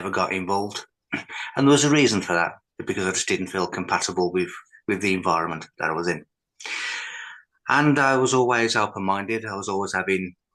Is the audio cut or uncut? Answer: uncut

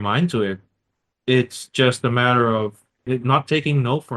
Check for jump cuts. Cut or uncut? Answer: cut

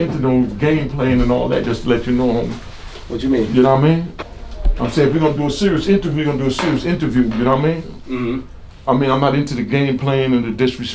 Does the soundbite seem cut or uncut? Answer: cut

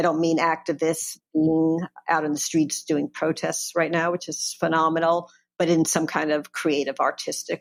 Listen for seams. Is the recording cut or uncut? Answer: uncut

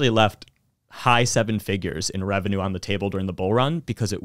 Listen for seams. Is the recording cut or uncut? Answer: uncut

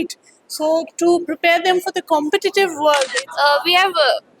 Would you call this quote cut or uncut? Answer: cut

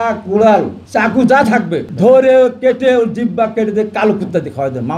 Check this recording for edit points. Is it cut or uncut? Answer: cut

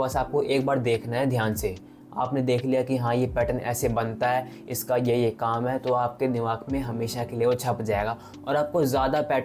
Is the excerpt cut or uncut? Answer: uncut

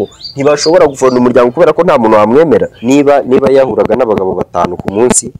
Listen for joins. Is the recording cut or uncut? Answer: cut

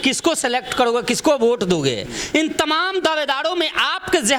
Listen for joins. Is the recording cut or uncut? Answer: uncut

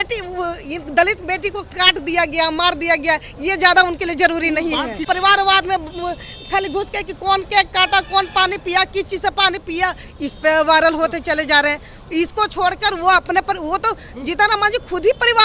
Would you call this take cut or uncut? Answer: cut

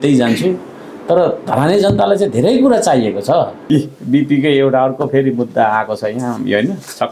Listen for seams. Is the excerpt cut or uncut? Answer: cut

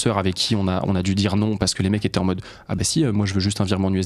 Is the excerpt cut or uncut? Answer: uncut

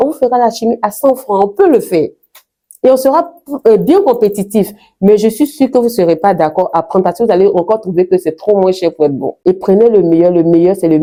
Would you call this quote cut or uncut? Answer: uncut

